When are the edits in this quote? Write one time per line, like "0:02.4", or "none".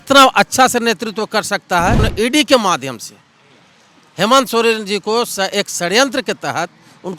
0:02.1

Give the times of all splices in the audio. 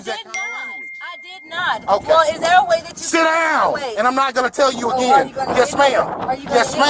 none

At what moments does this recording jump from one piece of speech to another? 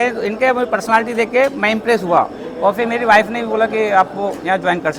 none

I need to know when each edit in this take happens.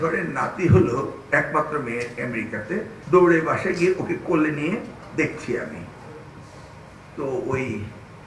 0:03.0

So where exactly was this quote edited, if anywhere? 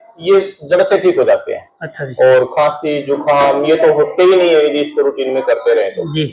none

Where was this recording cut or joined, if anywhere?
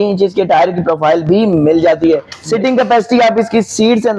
0:02.3

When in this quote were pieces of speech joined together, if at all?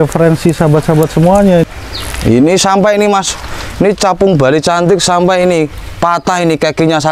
0:01.6

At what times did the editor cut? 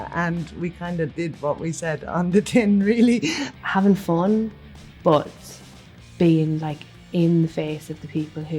0:03.5

